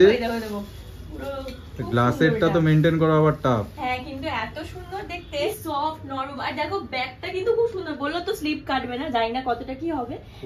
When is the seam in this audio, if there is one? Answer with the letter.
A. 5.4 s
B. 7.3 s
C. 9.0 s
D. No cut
A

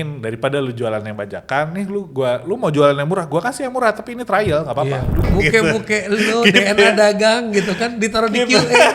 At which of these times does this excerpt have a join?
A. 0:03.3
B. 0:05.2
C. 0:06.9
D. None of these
B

